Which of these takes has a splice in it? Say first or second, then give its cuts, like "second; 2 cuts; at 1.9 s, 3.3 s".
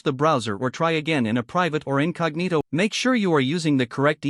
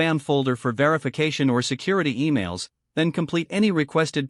first; 1 cut; at 2.6 s